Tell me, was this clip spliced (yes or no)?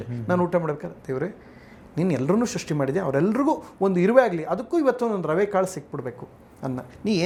no